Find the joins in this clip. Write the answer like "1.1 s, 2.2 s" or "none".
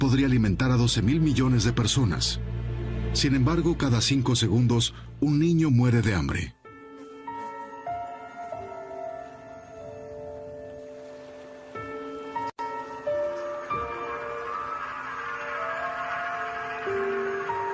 15.7 s